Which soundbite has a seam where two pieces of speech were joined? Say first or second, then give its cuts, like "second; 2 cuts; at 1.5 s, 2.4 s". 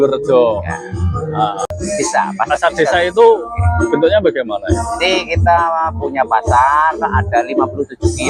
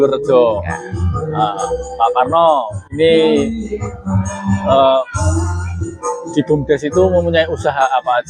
first; 1 cut; at 1.7 s